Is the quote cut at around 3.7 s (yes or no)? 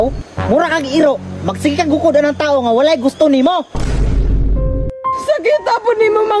no